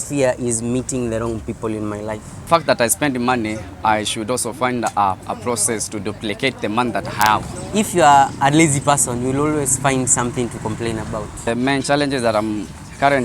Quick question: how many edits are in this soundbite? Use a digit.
3